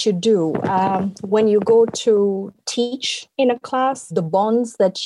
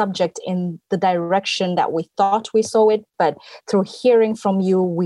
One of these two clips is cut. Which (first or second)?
first